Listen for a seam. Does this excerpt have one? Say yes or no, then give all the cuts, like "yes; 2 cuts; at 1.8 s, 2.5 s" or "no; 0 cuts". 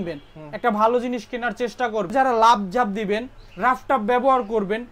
yes; 1 cut; at 2.1 s